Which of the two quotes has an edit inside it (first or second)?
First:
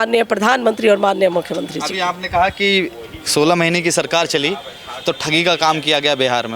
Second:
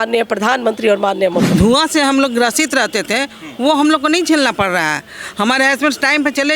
second